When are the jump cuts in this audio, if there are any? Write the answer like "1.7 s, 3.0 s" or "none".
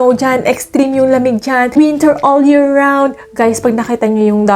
1.8 s

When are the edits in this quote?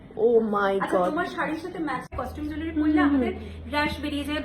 2.1 s

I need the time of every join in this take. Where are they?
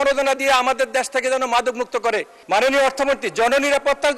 2.3 s

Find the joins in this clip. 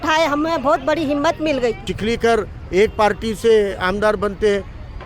1.9 s

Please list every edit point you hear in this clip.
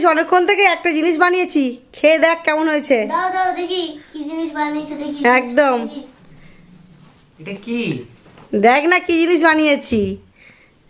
none

